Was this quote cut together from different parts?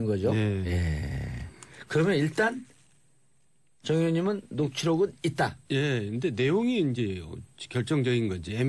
yes; 1 cut; at 1.9 s

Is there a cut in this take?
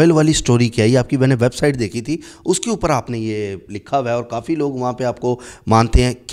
no; 0 cuts

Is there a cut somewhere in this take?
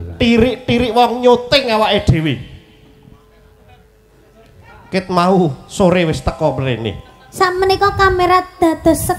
no; 0 cuts

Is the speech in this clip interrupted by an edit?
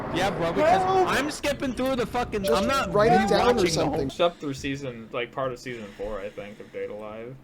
yes; 1 cut; at 4.1 s

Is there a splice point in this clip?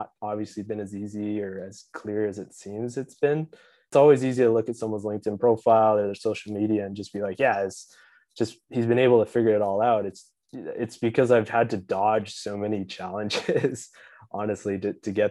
yes; 1 cut; at 3.9 s

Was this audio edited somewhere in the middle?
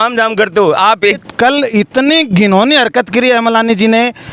yes; 1 cut; at 1.2 s

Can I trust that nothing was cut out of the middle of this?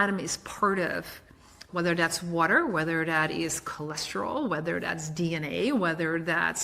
no; 1 cut; at 1.6 s

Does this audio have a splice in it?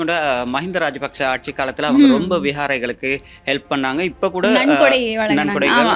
no; 0 cuts

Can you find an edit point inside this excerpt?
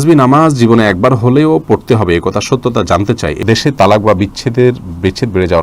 yes; 1 cut; at 3.4 s

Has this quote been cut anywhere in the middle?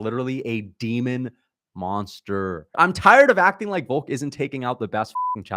yes; 1 cut; at 2.7 s

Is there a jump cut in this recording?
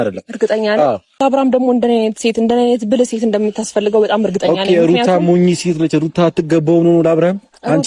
yes; 1 cut; at 1.2 s

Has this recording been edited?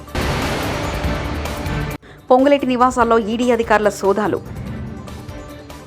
no; 0 cuts

